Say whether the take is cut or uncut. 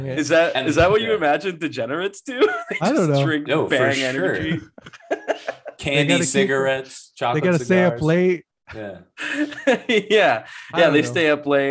uncut